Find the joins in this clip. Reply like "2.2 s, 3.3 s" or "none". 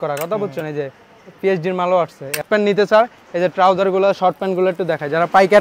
2.5 s